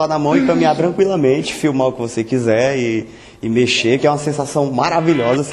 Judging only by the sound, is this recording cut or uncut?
uncut